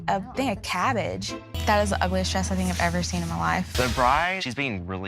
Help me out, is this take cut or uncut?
cut